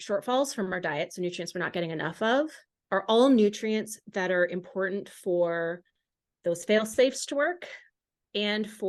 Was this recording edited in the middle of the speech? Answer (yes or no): no